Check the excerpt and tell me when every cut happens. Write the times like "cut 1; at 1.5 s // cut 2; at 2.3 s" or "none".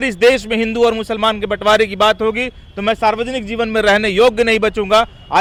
none